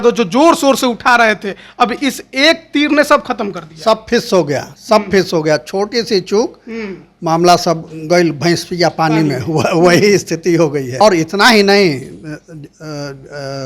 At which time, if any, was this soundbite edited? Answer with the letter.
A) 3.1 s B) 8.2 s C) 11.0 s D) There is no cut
C